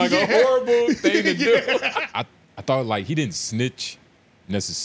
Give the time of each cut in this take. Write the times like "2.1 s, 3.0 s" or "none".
2.0 s